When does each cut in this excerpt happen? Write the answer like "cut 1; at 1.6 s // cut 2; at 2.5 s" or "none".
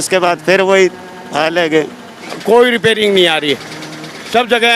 cut 1; at 2.3 s

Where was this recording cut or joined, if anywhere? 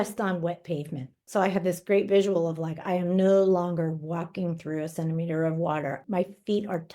cut 1; at 1.2 s // cut 2; at 6.0 s

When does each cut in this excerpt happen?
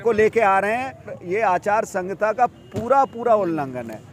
cut 1; at 1.1 s

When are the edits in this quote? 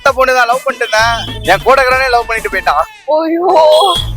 cut 1; at 1.3 s

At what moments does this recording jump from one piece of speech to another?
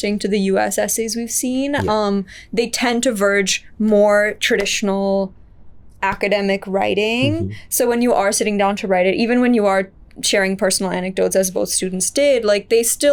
none

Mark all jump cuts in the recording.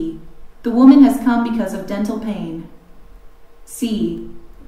cut 1; at 3.0 s

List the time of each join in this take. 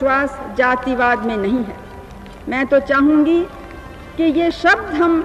none

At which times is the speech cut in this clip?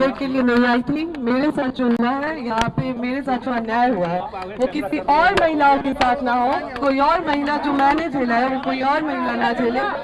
none

